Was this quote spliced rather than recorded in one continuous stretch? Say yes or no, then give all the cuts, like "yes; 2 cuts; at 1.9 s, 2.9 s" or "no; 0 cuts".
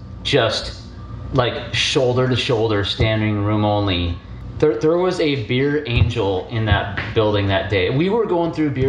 yes; 1 cut; at 4.0 s